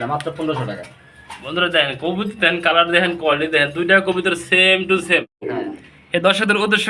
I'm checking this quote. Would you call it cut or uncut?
cut